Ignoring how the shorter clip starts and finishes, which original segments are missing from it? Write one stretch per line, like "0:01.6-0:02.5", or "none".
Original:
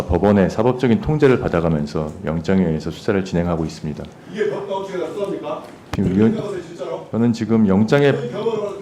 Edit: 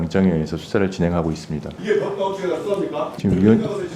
0:04.0-0:04.2
0:05.6-0:05.9